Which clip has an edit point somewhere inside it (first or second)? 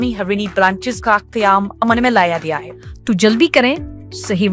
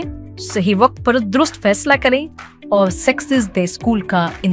first